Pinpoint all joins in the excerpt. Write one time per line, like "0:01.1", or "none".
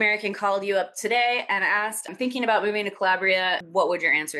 none